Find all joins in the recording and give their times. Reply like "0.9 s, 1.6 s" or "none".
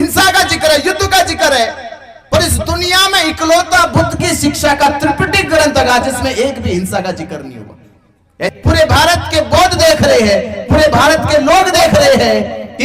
8.5 s